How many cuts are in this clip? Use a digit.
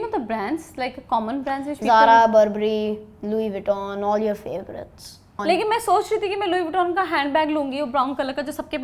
1